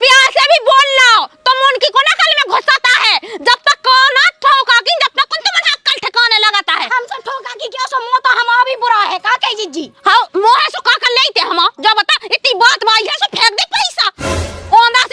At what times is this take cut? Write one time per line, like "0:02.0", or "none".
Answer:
none